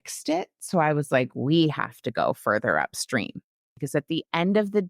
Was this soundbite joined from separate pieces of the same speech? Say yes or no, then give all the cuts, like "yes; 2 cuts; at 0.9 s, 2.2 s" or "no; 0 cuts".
yes; 1 cut; at 3.7 s